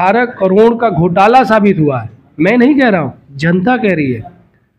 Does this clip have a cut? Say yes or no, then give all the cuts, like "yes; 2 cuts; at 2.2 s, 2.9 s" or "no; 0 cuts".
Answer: no; 0 cuts